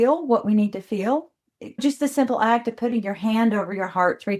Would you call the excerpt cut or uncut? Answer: cut